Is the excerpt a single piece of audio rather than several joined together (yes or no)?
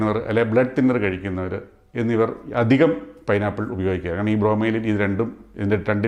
yes